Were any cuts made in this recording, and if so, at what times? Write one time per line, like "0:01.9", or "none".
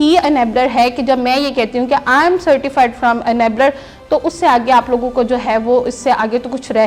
none